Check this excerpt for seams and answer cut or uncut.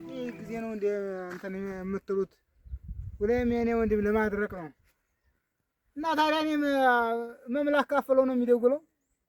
uncut